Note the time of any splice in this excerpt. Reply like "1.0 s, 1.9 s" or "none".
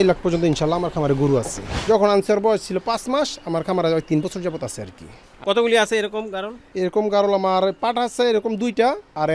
1.7 s